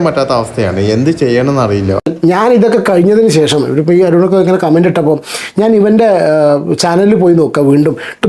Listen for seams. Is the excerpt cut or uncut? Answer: cut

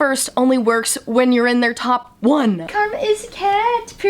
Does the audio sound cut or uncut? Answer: cut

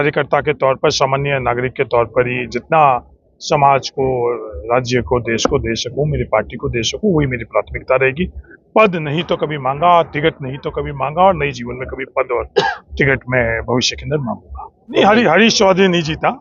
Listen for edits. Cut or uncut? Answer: cut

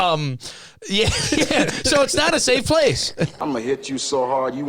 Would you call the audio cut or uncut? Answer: cut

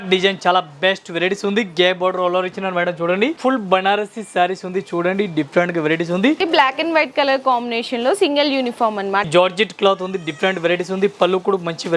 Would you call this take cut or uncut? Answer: cut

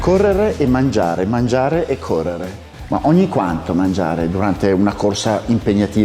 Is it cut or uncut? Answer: uncut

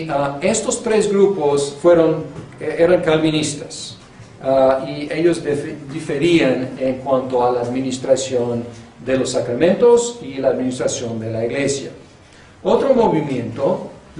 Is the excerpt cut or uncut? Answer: uncut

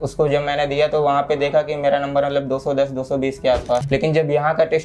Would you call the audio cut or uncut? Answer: cut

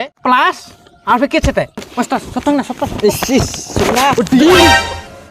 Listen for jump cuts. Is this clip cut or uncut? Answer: cut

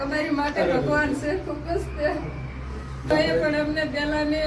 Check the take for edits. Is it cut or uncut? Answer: cut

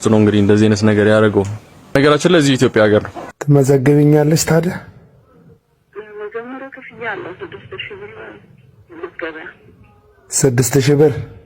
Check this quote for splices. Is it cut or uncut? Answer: cut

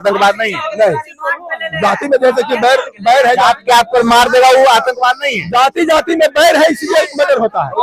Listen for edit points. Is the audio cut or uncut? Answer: uncut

